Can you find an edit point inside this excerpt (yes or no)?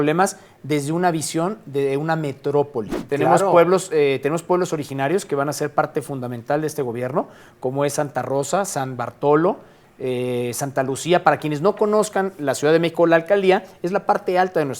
yes